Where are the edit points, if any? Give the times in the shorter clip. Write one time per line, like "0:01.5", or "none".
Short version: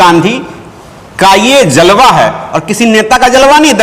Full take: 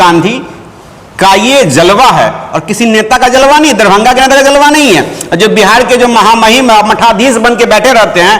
none